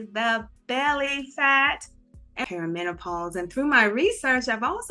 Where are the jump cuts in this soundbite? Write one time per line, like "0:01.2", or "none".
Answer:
0:02.4